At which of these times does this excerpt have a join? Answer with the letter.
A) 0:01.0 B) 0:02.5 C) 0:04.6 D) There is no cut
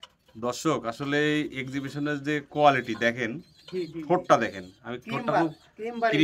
D